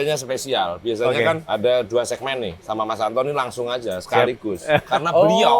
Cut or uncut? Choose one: cut